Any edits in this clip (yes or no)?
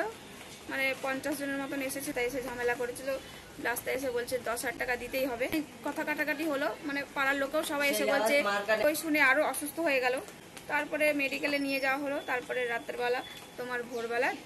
yes